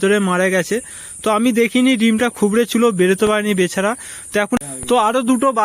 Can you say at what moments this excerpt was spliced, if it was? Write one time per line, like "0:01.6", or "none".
0:04.6